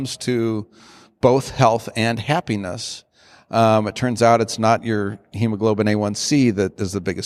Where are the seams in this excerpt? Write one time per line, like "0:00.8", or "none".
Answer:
none

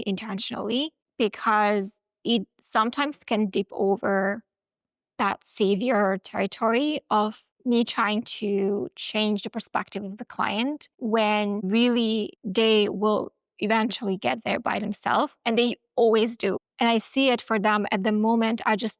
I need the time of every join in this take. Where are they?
none

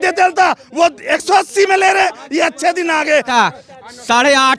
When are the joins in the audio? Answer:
0:03.3

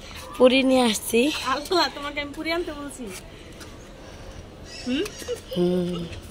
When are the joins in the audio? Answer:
none

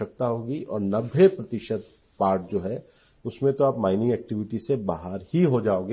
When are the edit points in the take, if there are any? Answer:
none

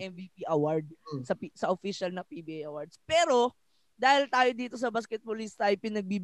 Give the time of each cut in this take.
none

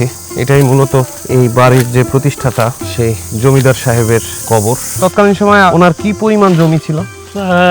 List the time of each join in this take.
0:04.9

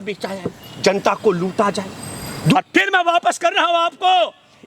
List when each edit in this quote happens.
0:02.5

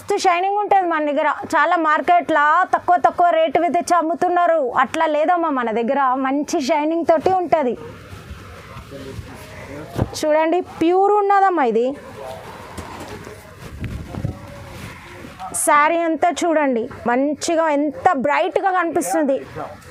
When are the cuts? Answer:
none

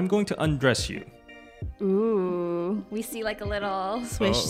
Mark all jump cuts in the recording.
none

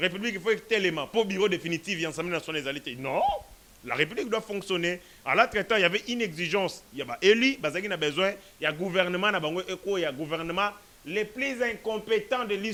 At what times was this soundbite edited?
none

